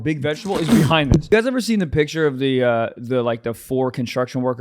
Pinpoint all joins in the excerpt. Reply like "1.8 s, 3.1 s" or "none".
1.3 s